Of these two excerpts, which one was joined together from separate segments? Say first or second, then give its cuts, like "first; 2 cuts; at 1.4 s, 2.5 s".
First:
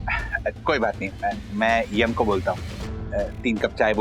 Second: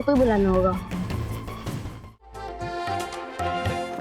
second; 1 cut; at 2.3 s